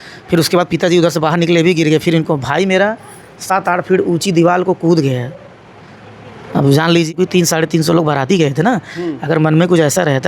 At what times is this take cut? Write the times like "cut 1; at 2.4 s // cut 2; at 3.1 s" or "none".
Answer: cut 1; at 7.1 s